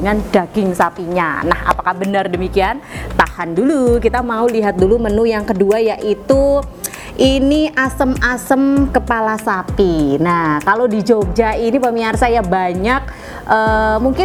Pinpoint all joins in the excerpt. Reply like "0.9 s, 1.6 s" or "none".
none